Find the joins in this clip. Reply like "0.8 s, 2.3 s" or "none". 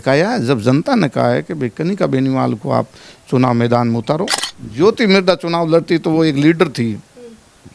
4.4 s